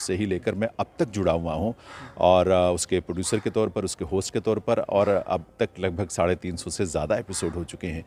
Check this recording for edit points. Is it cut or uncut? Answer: uncut